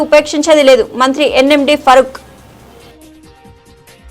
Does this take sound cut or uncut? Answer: cut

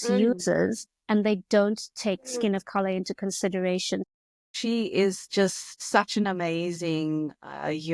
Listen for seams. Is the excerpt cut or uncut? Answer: cut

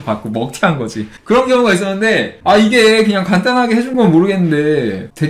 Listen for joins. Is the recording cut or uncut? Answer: uncut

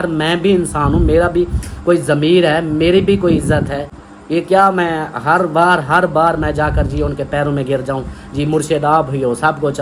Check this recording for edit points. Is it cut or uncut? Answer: uncut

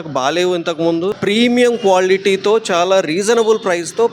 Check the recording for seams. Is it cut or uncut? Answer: cut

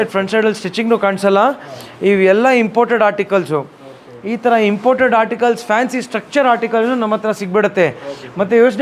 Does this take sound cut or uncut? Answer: uncut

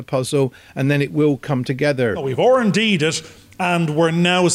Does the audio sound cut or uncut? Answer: cut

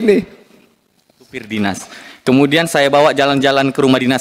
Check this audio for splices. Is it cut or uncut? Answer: cut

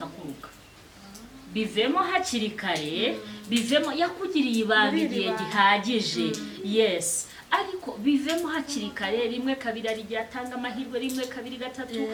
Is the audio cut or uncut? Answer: uncut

